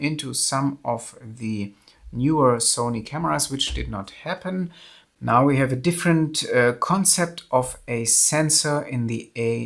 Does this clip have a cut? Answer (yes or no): no